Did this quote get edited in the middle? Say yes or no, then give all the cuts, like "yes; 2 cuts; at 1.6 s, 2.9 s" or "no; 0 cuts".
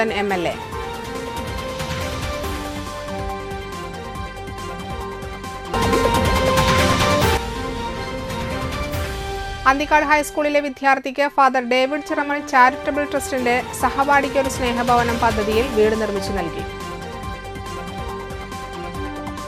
no; 0 cuts